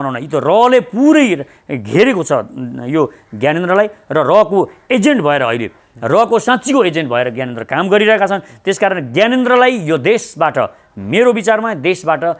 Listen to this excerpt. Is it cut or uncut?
uncut